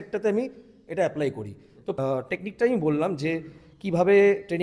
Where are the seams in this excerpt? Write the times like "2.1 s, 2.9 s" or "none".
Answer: 1.8 s